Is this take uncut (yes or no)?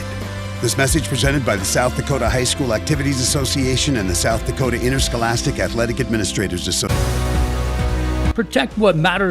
no